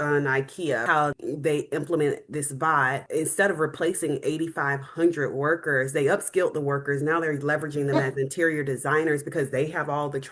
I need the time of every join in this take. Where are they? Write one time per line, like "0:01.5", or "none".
0:01.0
0:03.0

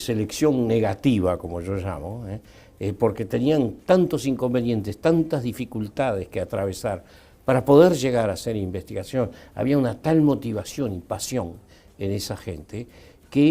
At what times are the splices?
0:07.7

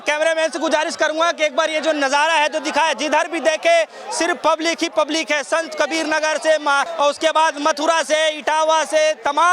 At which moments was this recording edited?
none

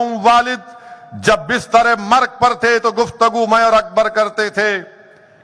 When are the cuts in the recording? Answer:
none

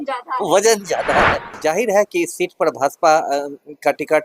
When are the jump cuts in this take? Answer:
0:01.6

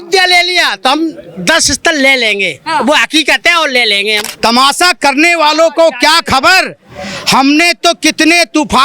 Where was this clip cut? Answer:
0:04.3

